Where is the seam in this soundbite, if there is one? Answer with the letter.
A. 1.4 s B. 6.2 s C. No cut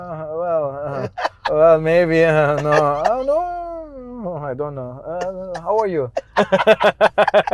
A